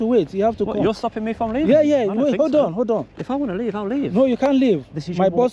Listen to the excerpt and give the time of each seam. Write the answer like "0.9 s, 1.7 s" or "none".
3.1 s

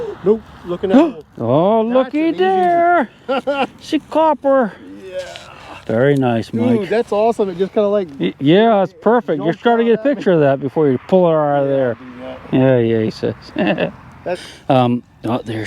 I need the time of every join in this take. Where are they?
14.4 s

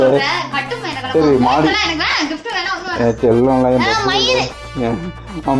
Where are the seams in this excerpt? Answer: none

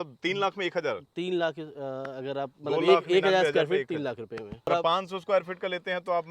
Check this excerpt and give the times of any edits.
4.7 s

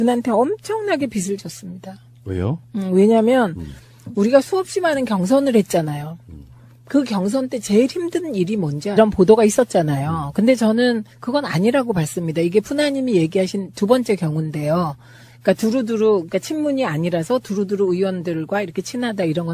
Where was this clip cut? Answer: none

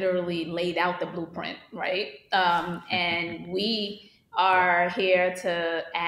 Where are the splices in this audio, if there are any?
none

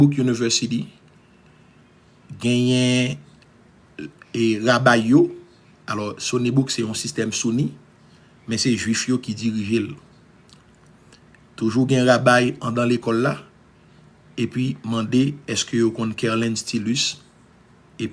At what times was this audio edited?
none

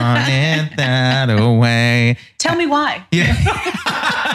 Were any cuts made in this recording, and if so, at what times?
none

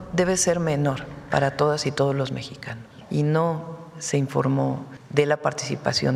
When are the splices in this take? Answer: 2.9 s, 5.0 s

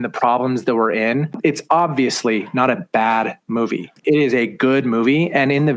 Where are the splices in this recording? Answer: 1.4 s, 3.9 s

